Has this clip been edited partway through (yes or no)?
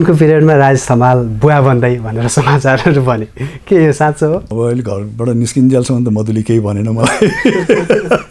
yes